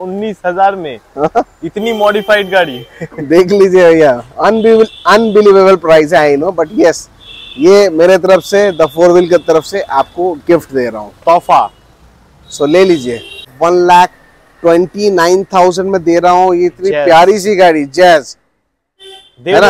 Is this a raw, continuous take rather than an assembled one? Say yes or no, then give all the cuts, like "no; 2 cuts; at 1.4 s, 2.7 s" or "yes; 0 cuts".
no; 1 cut; at 13.5 s